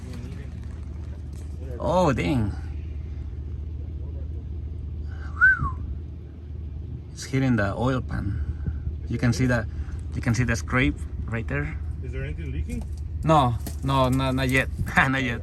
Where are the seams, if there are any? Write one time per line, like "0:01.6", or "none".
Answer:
none